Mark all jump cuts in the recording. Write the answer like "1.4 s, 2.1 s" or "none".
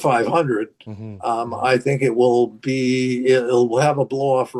none